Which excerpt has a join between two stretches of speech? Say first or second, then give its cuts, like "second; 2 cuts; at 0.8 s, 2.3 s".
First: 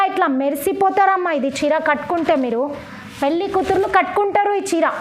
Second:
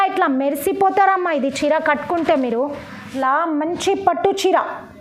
second; 1 cut; at 3.1 s